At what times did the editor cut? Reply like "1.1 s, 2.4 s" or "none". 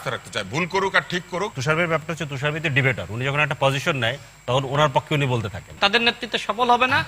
1.6 s, 5.7 s